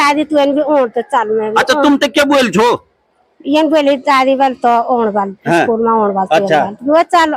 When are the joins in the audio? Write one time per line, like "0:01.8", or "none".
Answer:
none